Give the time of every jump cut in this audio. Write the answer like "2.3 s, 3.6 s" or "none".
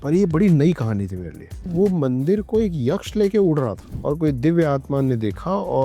1.7 s